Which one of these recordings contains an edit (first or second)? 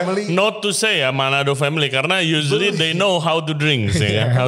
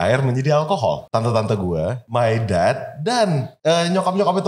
second